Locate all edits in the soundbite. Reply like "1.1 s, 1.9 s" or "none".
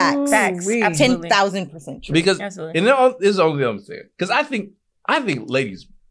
none